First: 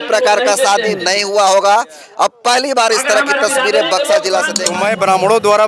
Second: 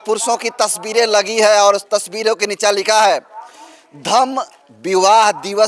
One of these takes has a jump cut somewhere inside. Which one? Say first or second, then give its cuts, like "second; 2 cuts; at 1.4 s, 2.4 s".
first; 1 cut; at 4.6 s